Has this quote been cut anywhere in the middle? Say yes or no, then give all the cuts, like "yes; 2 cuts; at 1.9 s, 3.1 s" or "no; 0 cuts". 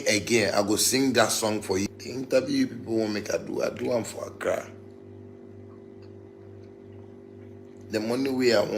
yes; 1 cut; at 1.9 s